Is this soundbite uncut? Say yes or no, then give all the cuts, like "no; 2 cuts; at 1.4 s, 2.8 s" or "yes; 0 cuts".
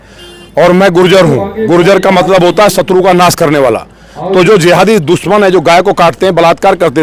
yes; 0 cuts